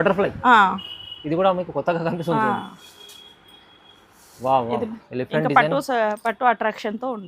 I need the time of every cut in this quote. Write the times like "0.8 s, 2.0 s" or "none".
5.0 s